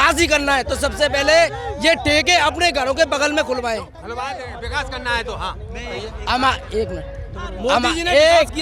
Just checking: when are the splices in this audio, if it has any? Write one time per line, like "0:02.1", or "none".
none